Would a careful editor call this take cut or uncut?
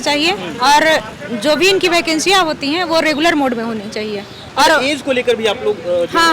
uncut